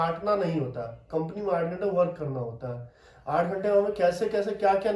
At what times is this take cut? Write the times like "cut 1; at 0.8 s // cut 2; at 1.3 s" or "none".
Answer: none